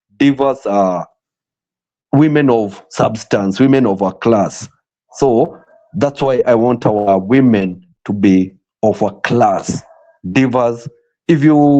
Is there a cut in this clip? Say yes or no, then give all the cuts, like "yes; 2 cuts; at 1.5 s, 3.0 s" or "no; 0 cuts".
no; 0 cuts